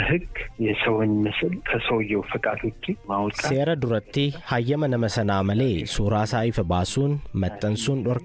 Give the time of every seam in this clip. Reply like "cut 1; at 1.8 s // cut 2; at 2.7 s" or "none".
cut 1; at 3.5 s